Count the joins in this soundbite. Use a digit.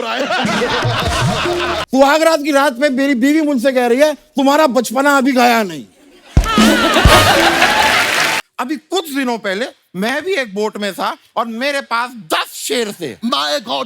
2